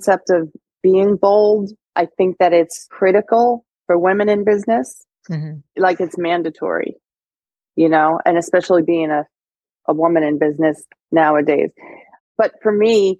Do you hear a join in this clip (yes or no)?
yes